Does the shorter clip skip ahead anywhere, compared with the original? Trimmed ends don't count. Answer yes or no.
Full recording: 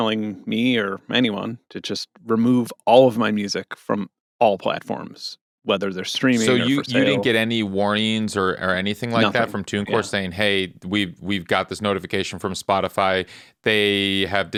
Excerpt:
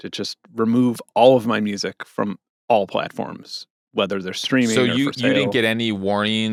no